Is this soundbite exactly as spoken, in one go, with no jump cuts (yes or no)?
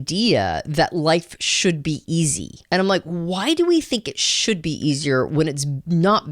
no